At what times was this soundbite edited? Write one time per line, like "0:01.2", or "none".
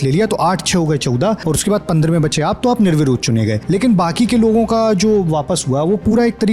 0:01.4
0:03.6